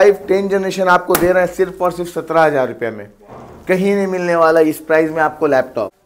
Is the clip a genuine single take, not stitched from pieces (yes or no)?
yes